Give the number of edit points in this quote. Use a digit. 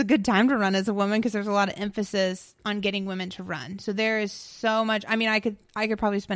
0